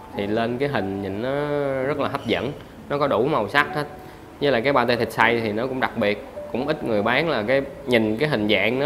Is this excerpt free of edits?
yes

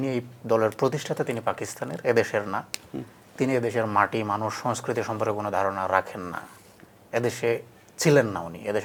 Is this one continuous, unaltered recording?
yes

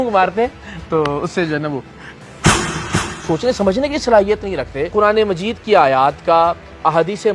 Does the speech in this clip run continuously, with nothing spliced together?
no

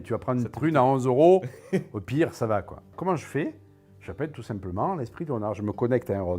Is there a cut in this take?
yes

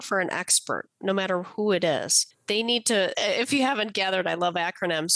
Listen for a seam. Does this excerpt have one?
yes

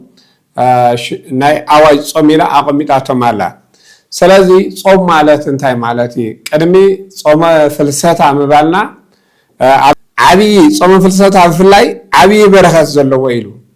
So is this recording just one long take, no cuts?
no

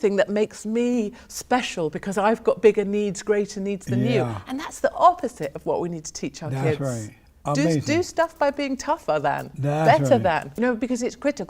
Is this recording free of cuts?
no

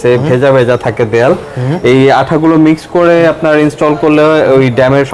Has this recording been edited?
no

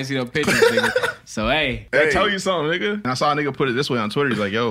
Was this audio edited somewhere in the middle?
yes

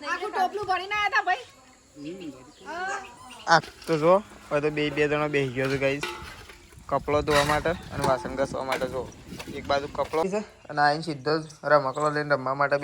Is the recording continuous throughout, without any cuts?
no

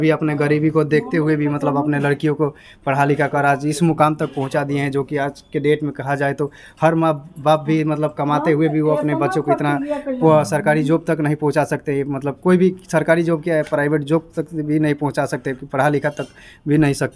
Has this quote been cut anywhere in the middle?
no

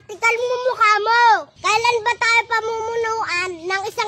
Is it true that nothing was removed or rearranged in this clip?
no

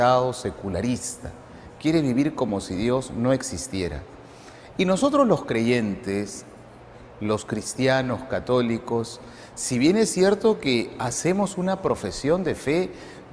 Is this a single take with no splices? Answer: no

